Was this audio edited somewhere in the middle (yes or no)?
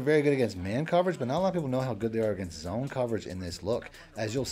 no